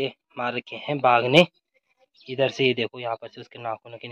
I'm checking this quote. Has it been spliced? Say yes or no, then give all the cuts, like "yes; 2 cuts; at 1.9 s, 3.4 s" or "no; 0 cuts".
no; 0 cuts